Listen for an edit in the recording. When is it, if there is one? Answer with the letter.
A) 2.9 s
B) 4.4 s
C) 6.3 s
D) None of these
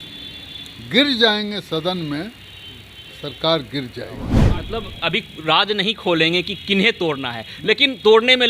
B